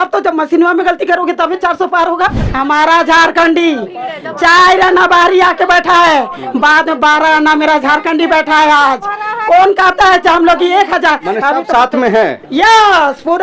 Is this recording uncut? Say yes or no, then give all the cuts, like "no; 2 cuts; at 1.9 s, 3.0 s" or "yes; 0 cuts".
no; 1 cut; at 2.4 s